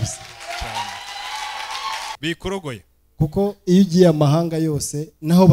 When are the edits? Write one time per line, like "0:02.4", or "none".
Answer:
0:02.2